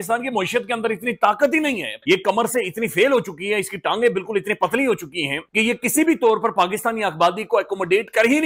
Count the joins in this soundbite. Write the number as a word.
one